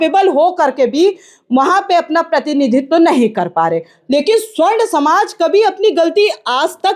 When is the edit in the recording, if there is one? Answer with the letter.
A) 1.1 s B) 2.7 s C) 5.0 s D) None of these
D